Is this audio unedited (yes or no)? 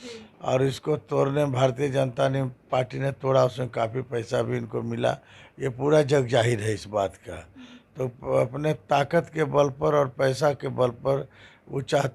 yes